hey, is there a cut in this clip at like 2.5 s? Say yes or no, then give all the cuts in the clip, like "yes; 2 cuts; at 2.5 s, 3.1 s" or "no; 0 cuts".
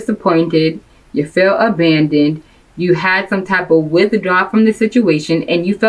no; 0 cuts